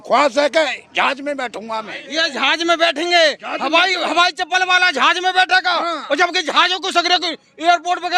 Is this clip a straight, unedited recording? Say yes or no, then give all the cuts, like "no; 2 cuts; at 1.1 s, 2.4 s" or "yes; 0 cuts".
no; 1 cut; at 2.0 s